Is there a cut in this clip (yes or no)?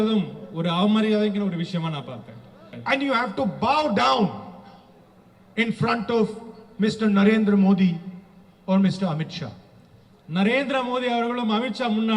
yes